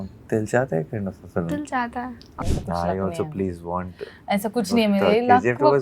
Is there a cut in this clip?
yes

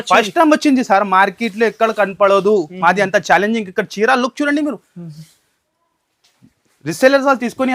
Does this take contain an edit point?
no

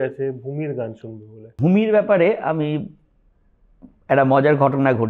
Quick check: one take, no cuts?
no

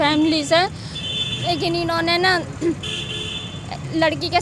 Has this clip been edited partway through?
no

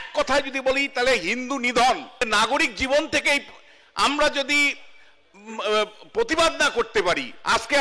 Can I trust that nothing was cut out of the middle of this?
no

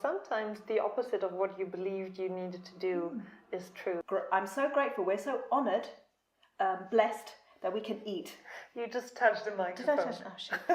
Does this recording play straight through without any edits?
no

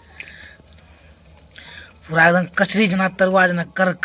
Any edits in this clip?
no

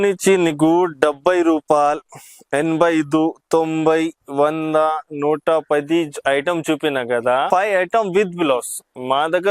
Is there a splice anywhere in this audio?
yes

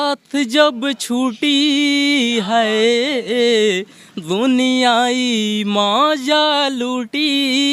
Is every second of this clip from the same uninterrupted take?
yes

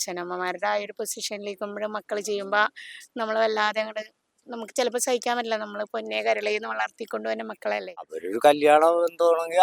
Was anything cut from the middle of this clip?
yes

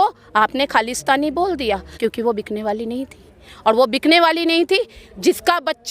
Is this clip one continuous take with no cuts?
no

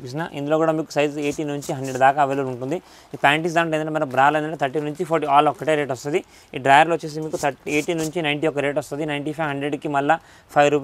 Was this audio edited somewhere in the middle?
no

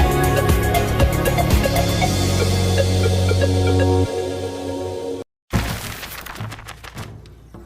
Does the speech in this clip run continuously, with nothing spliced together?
no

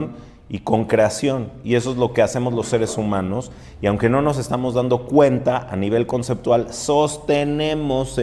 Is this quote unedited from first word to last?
yes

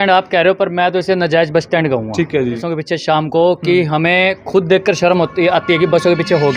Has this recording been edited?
yes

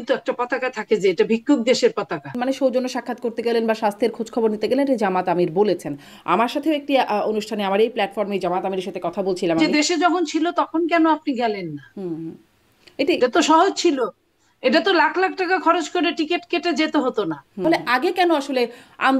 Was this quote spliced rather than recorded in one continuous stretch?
yes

